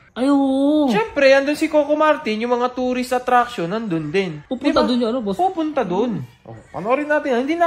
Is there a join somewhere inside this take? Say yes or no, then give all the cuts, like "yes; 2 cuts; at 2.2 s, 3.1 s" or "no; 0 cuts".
yes; 2 cuts; at 1.1 s, 4.3 s